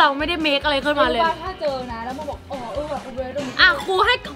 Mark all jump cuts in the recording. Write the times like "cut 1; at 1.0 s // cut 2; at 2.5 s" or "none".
none